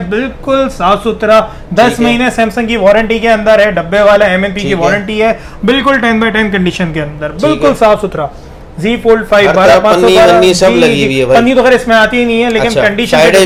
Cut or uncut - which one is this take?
uncut